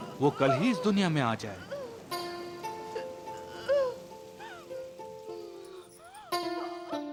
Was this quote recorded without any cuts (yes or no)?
yes